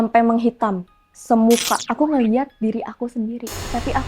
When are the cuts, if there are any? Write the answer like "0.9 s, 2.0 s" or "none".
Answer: 1.8 s